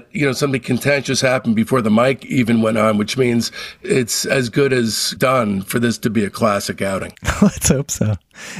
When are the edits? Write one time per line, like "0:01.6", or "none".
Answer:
0:03.7
0:05.0